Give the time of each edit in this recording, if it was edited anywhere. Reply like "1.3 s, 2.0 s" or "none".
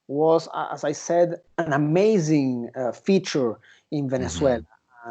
1.4 s